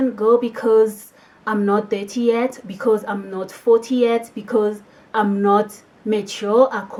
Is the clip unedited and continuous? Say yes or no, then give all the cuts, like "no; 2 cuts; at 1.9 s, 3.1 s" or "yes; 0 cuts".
yes; 0 cuts